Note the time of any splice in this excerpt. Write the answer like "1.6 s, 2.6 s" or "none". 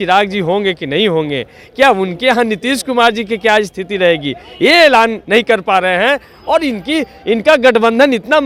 none